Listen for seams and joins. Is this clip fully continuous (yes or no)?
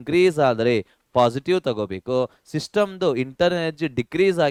yes